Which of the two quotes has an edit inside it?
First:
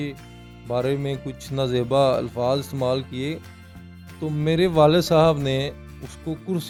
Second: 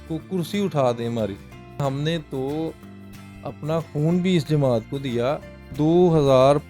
second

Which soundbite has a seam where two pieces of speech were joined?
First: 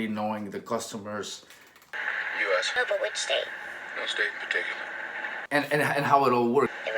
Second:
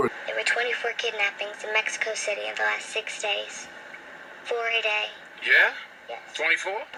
first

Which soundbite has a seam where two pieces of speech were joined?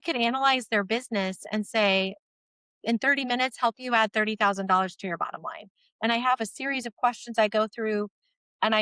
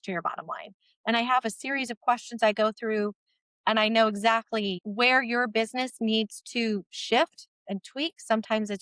second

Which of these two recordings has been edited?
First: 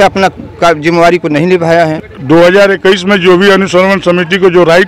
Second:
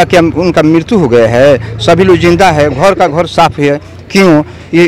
first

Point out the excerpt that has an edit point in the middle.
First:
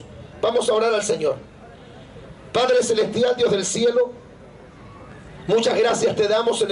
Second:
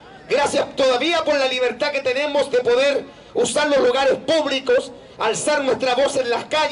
first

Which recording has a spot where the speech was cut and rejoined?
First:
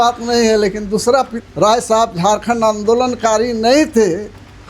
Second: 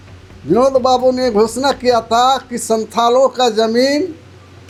first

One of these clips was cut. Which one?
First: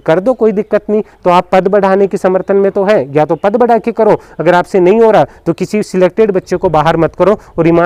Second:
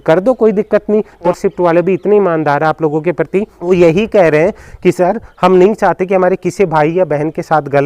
second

